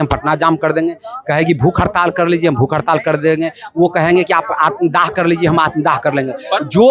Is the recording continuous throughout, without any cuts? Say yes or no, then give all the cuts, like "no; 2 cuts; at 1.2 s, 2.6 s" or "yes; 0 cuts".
yes; 0 cuts